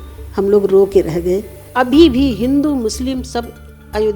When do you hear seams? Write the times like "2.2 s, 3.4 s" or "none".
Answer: 1.6 s